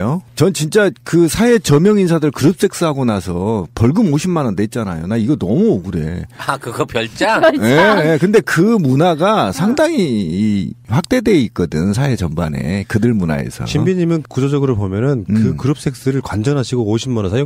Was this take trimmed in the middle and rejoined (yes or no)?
yes